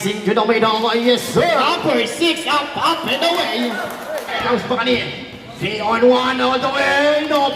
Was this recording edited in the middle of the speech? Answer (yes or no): yes